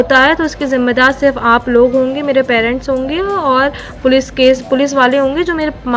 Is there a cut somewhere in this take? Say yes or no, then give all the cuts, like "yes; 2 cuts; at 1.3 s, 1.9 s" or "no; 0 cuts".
no; 0 cuts